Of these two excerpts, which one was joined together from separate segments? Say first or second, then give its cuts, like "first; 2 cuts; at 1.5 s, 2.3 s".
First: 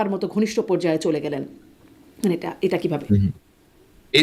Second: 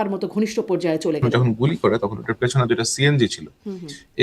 second; 1 cut; at 1.2 s